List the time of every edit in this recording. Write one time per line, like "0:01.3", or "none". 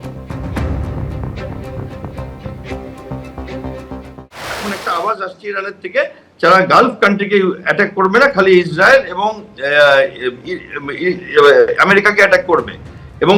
0:04.2